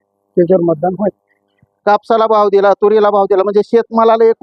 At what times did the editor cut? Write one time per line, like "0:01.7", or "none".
0:01.7